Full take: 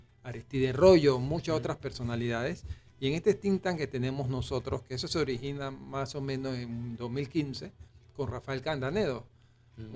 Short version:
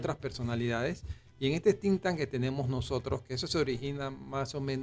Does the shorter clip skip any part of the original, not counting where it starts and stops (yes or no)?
no